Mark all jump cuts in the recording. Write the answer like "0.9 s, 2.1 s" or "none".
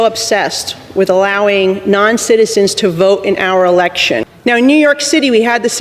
4.3 s